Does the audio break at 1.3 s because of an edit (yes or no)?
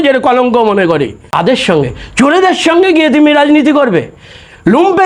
yes